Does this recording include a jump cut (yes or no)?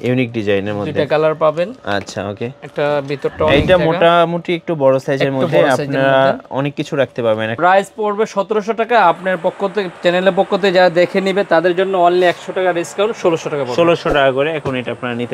yes